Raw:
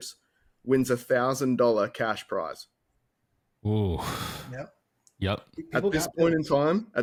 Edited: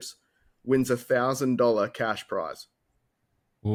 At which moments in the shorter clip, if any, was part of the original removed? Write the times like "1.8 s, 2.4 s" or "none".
none